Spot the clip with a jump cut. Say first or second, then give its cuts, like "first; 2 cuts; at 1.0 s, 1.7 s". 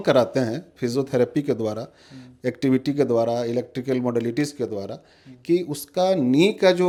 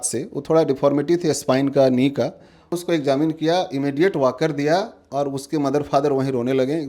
second; 1 cut; at 2.8 s